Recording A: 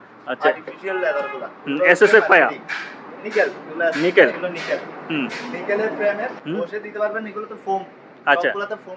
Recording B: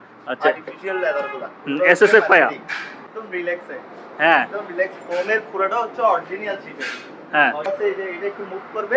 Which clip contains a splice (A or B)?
B